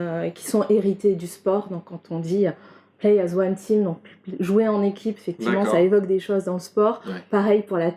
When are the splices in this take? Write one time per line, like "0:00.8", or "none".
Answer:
none